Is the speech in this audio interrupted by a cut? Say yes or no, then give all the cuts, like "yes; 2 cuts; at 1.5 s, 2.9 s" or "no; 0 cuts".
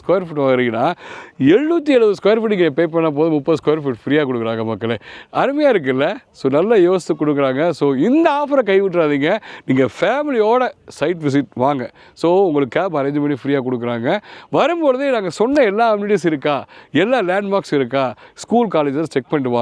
no; 0 cuts